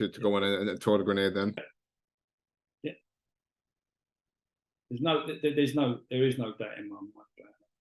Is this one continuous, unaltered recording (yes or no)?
no